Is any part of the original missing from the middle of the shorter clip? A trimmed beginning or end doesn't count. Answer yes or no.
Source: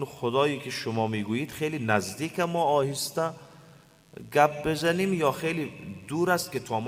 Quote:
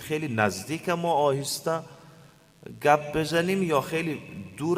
no